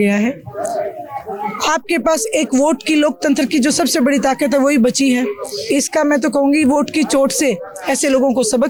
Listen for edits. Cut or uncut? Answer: uncut